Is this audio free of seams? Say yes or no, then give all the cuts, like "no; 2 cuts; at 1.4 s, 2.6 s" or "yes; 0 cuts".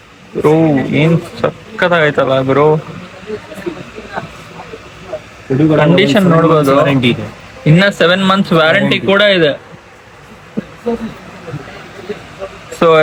yes; 0 cuts